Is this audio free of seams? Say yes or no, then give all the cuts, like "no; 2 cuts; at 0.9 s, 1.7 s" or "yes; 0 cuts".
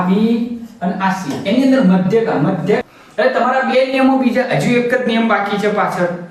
no; 1 cut; at 2.8 s